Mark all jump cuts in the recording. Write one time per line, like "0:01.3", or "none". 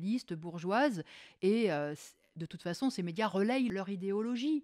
0:03.7